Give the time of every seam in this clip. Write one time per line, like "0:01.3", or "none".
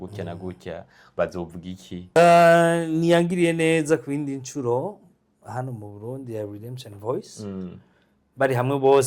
0:02.0